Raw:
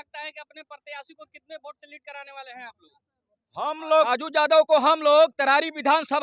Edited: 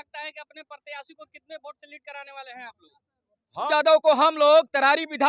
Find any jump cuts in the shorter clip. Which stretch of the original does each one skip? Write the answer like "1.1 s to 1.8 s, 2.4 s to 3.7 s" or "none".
3.7 s to 4.3 s